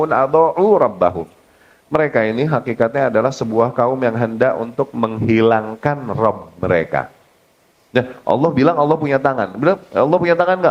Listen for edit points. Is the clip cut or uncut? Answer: uncut